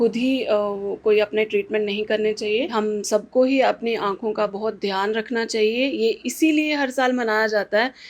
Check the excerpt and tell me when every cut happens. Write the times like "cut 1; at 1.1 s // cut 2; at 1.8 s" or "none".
cut 1; at 2.7 s